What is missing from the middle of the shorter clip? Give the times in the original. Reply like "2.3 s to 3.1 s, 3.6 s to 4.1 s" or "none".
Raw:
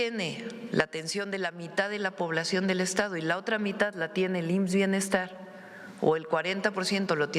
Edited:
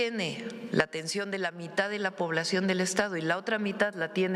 none